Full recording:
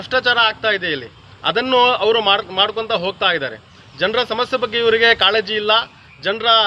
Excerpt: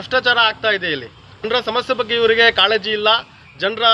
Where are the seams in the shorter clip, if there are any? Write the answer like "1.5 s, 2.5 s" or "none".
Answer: 1.4 s